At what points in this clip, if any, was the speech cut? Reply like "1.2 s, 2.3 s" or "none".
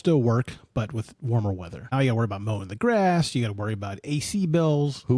1.9 s